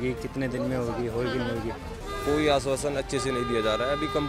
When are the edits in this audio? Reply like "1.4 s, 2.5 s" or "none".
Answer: 1.9 s